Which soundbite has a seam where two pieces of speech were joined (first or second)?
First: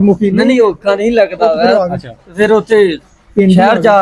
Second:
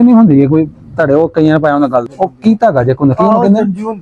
second